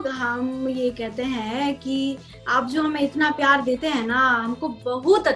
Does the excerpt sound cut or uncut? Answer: uncut